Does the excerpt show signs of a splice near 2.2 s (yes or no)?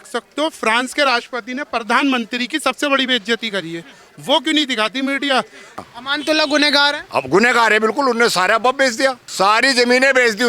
no